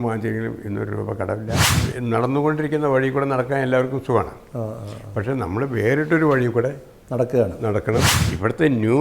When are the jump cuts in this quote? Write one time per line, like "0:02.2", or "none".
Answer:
0:01.8
0:08.2